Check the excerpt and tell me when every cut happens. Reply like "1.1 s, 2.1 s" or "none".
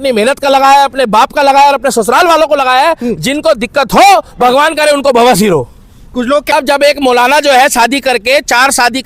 6.5 s